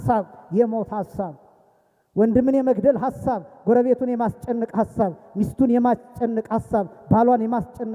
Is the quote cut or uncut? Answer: uncut